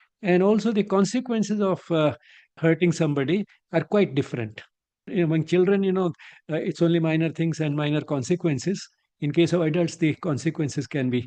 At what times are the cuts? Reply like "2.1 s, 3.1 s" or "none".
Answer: 2.5 s, 5.1 s